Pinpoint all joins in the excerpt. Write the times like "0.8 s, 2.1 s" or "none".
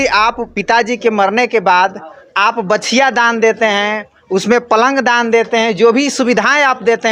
none